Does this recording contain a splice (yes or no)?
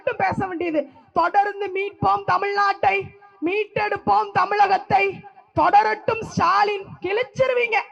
no